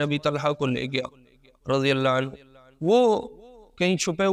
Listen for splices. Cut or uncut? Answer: uncut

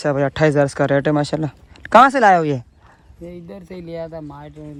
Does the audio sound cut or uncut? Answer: uncut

